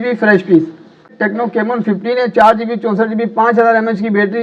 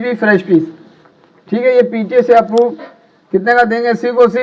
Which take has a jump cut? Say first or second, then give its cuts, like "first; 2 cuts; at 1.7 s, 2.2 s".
first; 1 cut; at 1.1 s